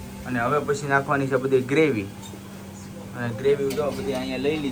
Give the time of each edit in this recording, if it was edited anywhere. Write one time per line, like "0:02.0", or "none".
none